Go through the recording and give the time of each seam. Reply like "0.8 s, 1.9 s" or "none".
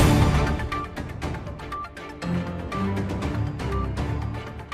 2.2 s